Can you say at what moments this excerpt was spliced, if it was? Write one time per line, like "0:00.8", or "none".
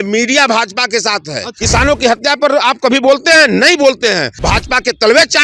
0:01.5
0:04.3